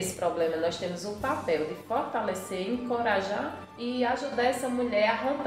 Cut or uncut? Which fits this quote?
cut